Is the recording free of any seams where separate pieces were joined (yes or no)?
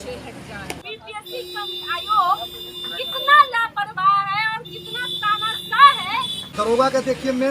no